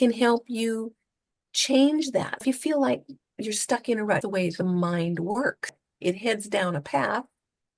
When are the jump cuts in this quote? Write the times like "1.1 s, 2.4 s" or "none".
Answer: 2.4 s, 4.2 s, 5.8 s